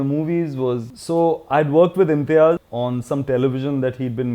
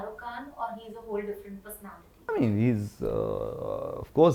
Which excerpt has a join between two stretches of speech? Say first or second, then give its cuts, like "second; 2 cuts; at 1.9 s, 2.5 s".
first; 1 cut; at 2.7 s